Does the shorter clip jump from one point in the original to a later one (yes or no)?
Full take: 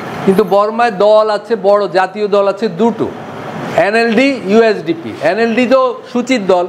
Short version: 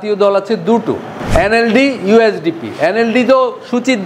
yes